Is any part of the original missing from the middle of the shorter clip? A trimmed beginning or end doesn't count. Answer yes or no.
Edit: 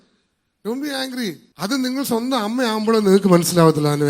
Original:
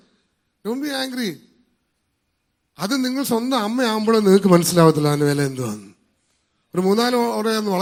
yes